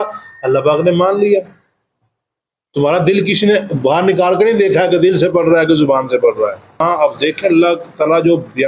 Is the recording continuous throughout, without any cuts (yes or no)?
no